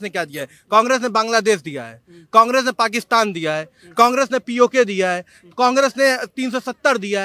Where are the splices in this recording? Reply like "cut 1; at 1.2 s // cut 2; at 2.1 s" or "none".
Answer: none